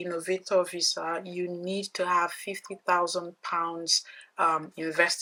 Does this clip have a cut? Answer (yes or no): no